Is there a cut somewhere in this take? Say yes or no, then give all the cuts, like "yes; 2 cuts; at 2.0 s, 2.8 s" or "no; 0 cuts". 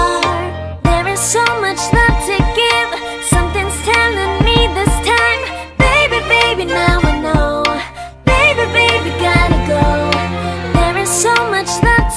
no; 0 cuts